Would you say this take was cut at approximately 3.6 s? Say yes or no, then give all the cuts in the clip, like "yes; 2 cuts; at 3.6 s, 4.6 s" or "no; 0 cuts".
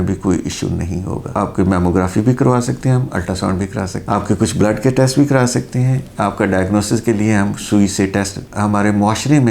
no; 2 cuts; at 1.3 s, 8.4 s